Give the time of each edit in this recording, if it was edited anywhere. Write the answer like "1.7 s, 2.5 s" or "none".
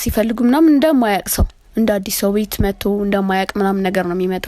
none